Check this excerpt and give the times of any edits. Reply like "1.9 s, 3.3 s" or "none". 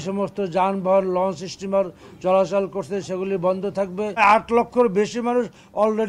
4.2 s